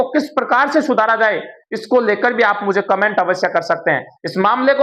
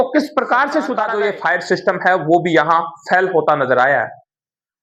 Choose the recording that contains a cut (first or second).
second